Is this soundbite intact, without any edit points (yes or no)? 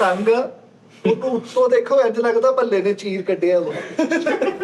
yes